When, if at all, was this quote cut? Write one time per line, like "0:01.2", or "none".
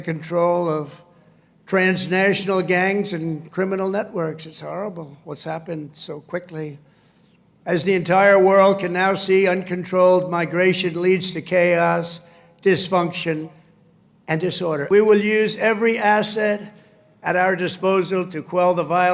0:14.8